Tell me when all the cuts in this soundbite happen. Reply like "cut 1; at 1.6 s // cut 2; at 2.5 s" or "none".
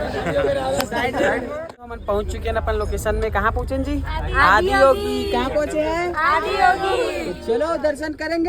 cut 1; at 1.9 s